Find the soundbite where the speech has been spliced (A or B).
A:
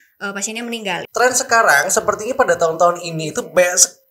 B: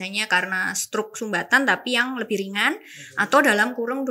A